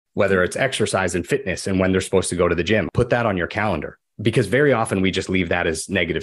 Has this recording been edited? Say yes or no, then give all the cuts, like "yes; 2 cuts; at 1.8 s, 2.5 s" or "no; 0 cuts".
yes; 2 cuts; at 2.9 s, 4.0 s